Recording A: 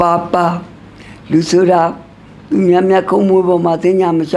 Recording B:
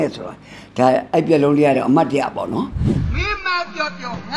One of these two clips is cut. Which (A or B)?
B